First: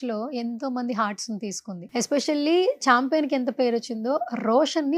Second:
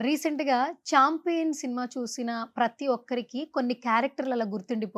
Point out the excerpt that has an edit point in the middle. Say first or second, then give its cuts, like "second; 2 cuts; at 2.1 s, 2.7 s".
first; 1 cut; at 1.8 s